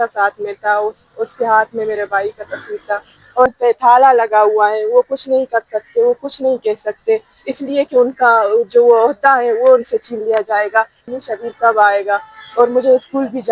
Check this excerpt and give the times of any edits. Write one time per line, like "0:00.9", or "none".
0:03.5
0:11.1